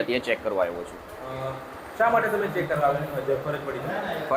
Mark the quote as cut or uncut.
uncut